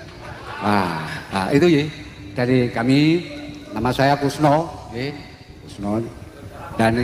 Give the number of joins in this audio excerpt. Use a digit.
1